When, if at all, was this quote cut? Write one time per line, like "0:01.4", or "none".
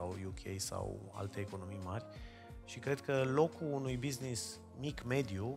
none